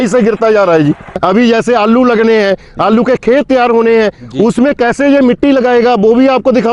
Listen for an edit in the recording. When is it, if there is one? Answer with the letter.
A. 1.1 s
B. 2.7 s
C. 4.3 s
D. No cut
A